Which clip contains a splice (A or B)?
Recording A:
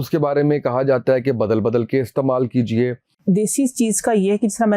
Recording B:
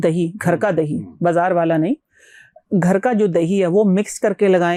A